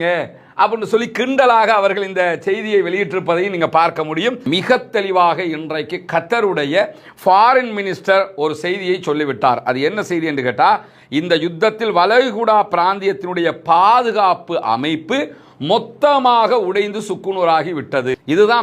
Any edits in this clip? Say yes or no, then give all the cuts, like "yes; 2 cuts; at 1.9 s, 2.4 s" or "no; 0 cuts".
yes; 1 cut; at 4.4 s